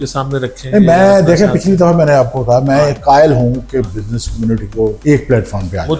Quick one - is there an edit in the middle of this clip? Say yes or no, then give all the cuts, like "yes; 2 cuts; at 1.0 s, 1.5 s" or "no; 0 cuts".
yes; 1 cut; at 5.0 s